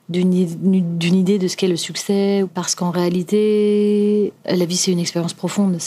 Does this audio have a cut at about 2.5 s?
yes; 2 cuts; at 2.5 s, 4.4 s

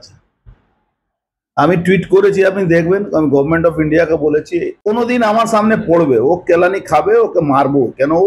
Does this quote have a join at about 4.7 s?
yes; 1 cut; at 4.7 s

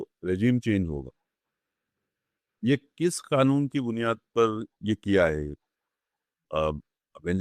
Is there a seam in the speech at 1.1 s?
no; 0 cuts

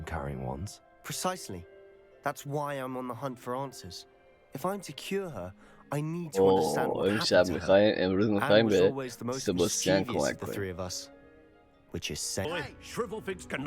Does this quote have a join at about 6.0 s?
no; 1 cut; at 12.4 s

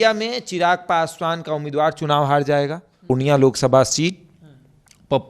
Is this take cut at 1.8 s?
no; 1 cut; at 3.1 s

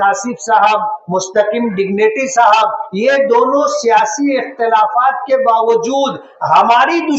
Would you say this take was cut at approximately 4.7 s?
no; 0 cuts

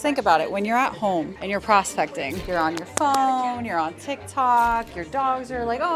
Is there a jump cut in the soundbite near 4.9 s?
no; 2 cuts; at 1.4 s, 2.4 s

